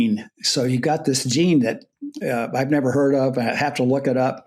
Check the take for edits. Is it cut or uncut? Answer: uncut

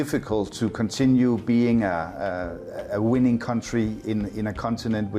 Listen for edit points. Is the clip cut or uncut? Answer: uncut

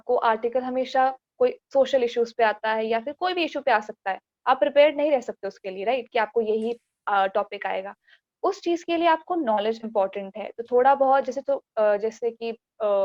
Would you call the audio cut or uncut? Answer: uncut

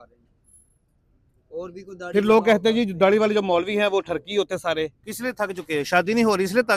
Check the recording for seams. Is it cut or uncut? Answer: cut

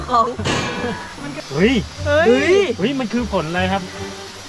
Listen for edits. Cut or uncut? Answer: cut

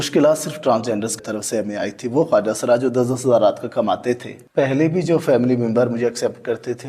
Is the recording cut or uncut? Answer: cut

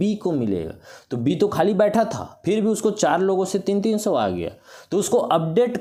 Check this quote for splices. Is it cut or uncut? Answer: uncut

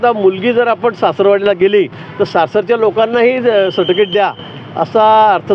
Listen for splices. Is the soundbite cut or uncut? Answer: uncut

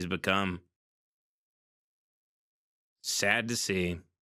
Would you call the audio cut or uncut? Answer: uncut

